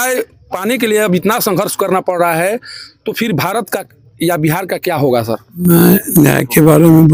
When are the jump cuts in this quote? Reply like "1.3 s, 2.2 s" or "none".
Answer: none